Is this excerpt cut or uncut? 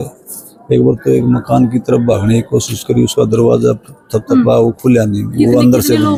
uncut